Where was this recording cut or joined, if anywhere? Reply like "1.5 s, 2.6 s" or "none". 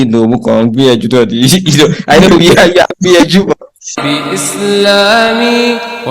4.0 s